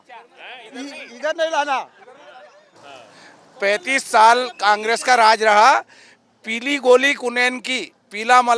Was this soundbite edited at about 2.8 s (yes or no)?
yes